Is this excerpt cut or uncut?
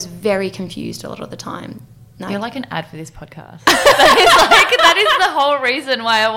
uncut